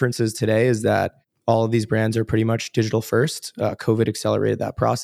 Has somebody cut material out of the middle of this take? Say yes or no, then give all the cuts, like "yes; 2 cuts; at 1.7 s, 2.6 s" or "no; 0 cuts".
yes; 1 cut; at 1.3 s